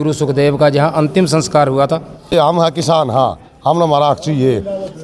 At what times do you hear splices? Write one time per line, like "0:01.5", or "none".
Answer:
0:02.3